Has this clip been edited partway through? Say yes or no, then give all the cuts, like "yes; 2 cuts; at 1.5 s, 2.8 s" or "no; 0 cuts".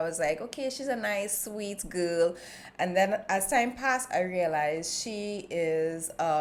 no; 0 cuts